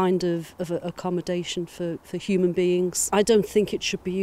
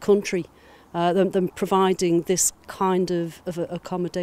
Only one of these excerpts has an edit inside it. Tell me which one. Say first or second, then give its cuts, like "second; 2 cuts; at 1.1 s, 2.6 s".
first; 1 cut; at 3.0 s